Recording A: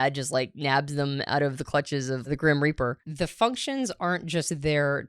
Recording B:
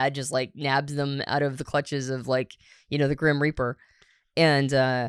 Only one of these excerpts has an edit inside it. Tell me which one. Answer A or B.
A